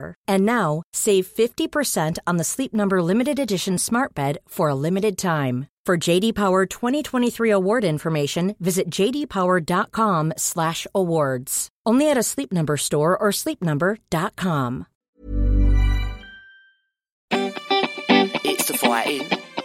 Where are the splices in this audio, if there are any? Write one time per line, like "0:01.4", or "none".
0:17.3